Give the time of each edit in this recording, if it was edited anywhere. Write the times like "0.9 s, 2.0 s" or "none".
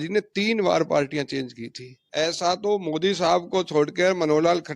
1.9 s